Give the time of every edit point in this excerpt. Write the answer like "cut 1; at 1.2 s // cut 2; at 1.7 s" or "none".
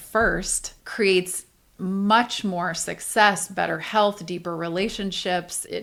none